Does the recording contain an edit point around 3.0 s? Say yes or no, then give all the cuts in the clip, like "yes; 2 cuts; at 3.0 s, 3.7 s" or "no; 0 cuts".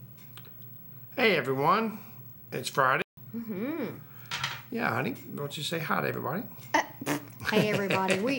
yes; 1 cut; at 3.0 s